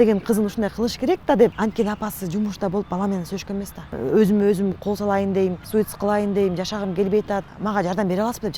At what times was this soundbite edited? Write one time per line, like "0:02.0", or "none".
0:01.5
0:03.9
0:05.6
0:07.5